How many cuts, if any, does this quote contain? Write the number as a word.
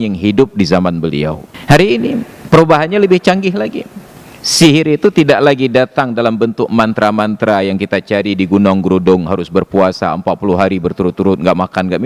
two